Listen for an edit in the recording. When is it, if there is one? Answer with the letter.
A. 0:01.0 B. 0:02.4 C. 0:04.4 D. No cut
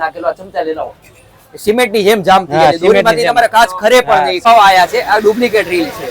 C